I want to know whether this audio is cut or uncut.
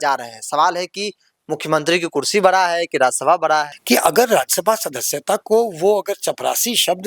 cut